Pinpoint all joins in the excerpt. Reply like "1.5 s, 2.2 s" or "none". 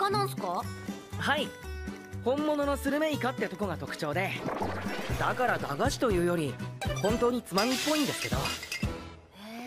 4.0 s